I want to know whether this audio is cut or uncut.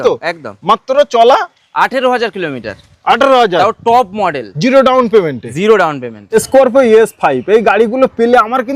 cut